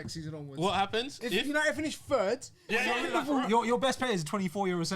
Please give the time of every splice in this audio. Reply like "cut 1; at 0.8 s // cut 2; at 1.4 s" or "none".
cut 1; at 2.9 s